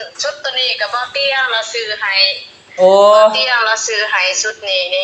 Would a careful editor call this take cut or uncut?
uncut